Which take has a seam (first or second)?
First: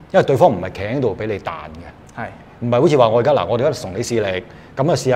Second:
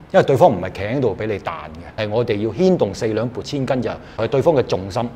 second